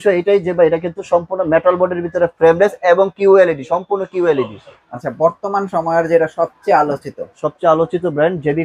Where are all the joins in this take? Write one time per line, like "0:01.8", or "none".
0:04.9